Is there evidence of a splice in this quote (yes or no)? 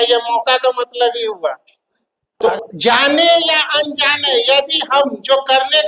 yes